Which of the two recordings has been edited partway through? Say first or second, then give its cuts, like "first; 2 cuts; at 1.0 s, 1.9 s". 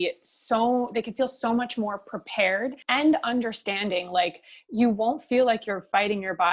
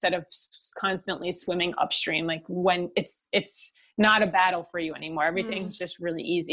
first; 1 cut; at 2.8 s